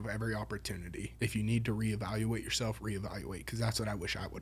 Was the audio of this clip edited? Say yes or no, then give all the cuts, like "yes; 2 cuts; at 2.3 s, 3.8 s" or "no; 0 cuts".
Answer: yes; 1 cut; at 1.1 s